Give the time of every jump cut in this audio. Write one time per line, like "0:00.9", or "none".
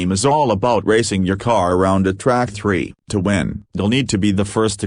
0:02.5